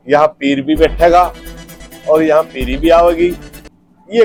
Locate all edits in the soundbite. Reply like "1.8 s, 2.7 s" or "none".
none